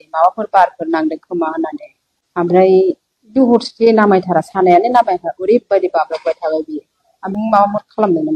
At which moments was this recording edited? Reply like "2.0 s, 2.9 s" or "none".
7.2 s